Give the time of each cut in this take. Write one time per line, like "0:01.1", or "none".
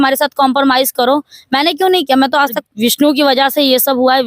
0:02.6